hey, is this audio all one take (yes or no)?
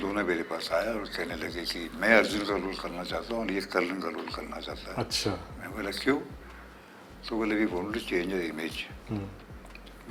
yes